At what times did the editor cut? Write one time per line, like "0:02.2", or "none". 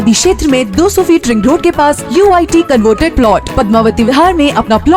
none